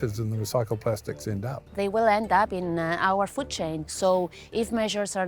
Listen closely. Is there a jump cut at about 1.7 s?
yes; 2 cuts; at 1.7 s, 3.9 s

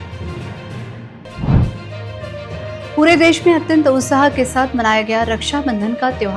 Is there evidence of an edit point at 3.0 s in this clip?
no; 1 cut; at 1.1 s

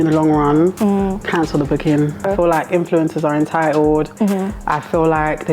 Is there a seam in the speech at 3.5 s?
no; 1 cut; at 2.3 s

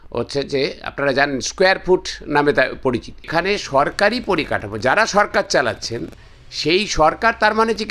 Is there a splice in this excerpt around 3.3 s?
yes; 1 cut; at 3.3 s

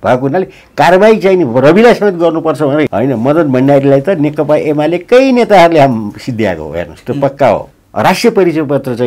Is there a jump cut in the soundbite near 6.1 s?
no; 2 cuts; at 2.9 s, 7.8 s

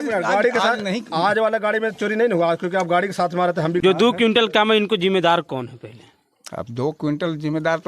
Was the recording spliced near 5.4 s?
no; 1 cut; at 3.8 s

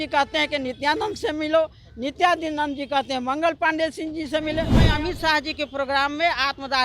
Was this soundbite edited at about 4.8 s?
yes; 1 cut; at 4.8 s

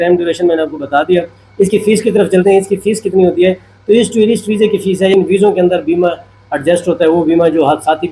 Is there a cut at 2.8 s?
no; 1 cut; at 5.1 s

